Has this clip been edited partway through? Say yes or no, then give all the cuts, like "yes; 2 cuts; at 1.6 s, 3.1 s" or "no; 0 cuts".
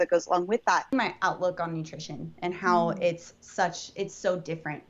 yes; 1 cut; at 0.9 s